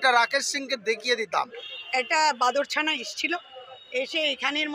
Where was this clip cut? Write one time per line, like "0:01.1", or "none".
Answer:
0:01.6